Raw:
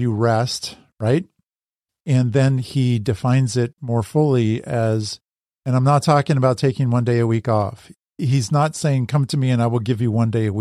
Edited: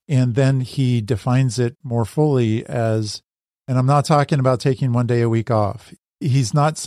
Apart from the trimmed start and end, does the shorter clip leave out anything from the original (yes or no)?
no